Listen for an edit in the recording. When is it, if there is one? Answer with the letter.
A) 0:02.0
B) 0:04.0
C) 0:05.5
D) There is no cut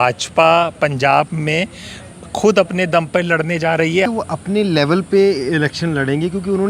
B